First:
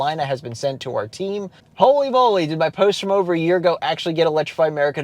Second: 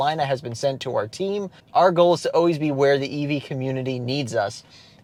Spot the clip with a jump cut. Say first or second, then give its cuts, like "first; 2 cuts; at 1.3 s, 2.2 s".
first; 1 cut; at 1.6 s